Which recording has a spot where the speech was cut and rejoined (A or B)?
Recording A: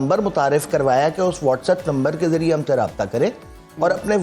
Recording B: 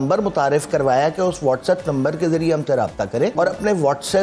B